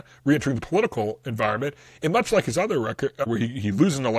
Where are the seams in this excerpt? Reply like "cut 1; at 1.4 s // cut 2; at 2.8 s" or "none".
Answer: cut 1; at 3.2 s